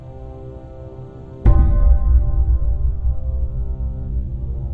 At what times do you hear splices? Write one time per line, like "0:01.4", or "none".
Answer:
0:02.1